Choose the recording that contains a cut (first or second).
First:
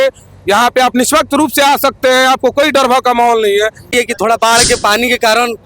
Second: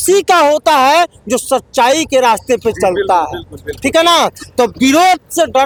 first